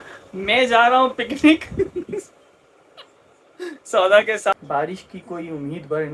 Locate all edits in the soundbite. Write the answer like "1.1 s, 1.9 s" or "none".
4.5 s